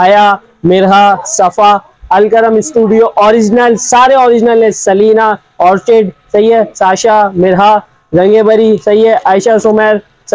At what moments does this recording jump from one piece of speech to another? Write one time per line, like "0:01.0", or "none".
none